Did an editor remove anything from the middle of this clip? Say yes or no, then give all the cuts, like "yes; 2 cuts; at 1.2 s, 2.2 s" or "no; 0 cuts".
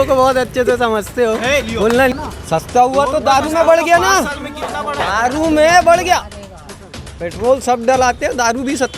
yes; 1 cut; at 2.1 s